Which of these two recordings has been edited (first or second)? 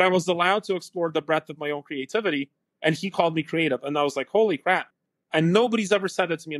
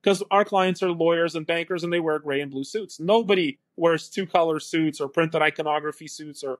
first